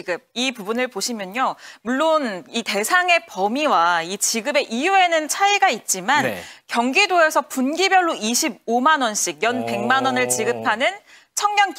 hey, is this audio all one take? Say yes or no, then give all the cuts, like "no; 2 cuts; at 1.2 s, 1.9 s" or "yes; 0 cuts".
yes; 0 cuts